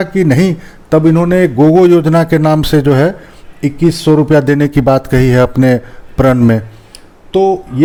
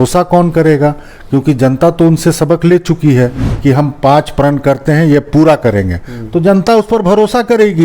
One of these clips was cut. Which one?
second; 1 cut; at 3.4 s

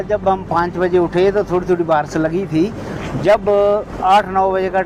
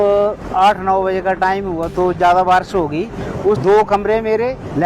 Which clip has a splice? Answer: second; 1 cut; at 3.6 s

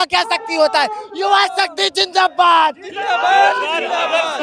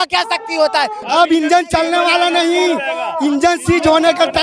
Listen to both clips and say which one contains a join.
second; 1 cut; at 1.0 s

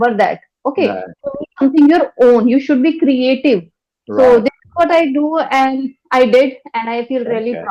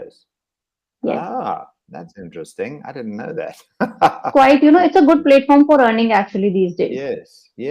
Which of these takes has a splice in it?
second; 1 cut; at 4.3 s

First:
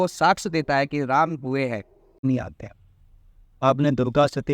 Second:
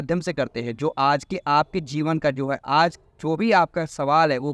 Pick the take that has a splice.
first; 1 cut; at 2.2 s

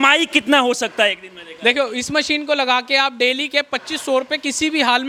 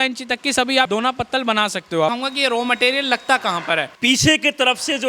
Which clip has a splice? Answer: second; 3 cuts; at 0.9 s, 2.1 s, 3.9 s

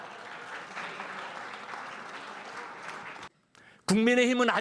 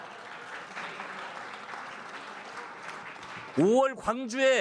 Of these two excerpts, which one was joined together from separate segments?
first; 1 cut; at 3.3 s

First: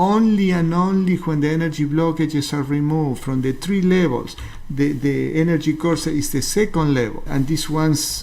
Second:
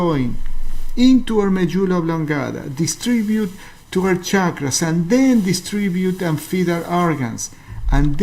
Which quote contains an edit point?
first; 1 cut; at 7.3 s

